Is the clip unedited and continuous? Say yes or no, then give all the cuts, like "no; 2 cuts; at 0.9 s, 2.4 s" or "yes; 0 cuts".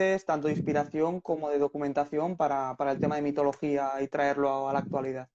yes; 0 cuts